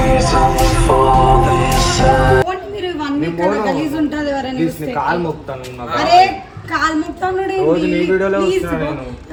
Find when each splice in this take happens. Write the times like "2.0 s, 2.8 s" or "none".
none